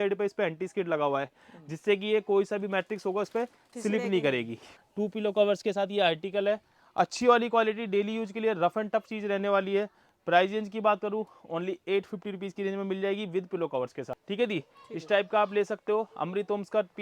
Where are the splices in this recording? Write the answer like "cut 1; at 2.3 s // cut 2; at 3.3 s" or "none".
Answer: cut 1; at 4.8 s // cut 2; at 14.2 s